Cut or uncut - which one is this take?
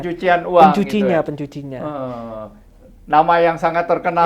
uncut